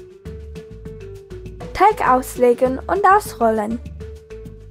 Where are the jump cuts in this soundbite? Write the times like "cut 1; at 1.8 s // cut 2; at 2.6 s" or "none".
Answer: cut 1; at 1.8 s // cut 2; at 3.9 s